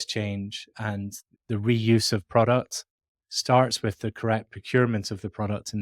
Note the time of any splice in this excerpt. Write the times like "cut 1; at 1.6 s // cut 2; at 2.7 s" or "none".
cut 1; at 1.3 s